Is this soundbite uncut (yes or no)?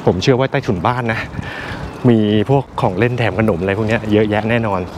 yes